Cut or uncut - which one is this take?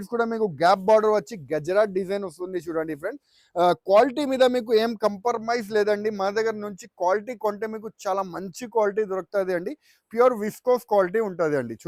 uncut